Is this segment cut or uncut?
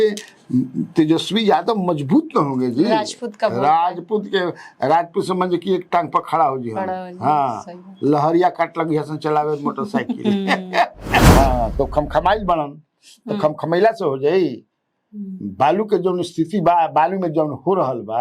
cut